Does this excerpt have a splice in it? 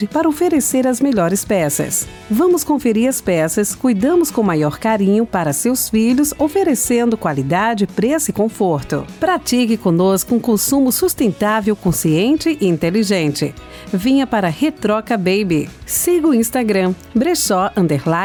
no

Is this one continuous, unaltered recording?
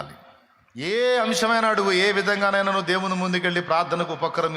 no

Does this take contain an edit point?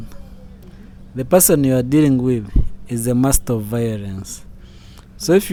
no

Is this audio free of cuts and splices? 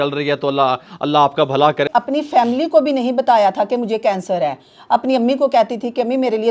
no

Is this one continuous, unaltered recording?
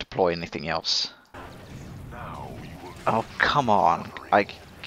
no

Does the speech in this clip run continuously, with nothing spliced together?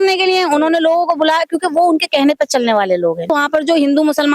no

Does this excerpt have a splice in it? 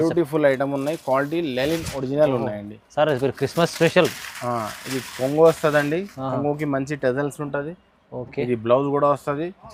no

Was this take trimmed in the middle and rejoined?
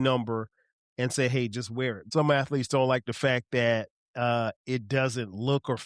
yes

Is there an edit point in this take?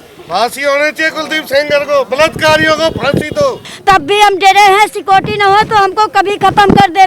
yes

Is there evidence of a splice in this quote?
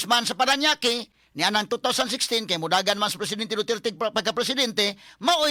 no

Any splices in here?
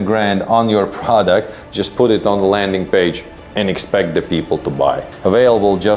yes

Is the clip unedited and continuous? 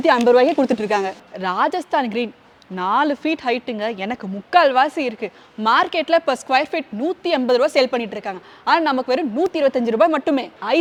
yes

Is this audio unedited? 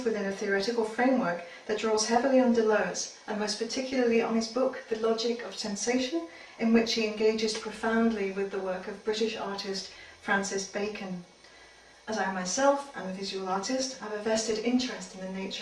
no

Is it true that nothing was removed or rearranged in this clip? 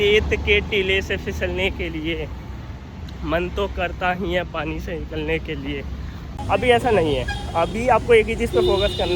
no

